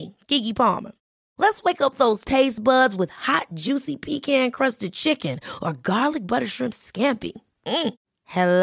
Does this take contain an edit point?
no; 0 cuts

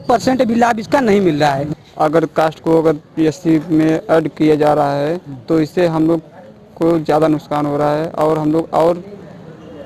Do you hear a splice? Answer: yes; 1 cut; at 1.8 s

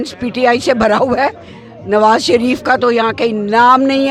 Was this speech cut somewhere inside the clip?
no; 0 cuts

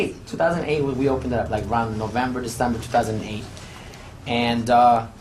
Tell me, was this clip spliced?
yes; 1 cut; at 2.5 s

